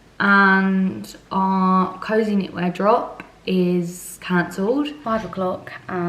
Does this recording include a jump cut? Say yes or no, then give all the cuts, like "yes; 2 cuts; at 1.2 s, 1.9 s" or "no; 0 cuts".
yes; 1 cut; at 5.0 s